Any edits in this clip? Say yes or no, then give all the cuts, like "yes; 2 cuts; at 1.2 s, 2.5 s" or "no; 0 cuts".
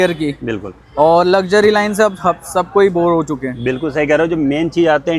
no; 0 cuts